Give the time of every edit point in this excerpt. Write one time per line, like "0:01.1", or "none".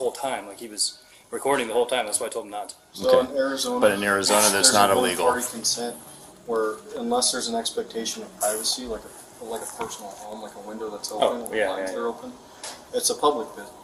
none